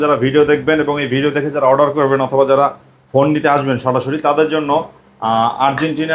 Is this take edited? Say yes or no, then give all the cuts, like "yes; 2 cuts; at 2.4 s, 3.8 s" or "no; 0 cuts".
no; 0 cuts